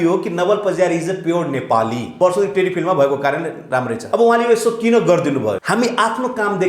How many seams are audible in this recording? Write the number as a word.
three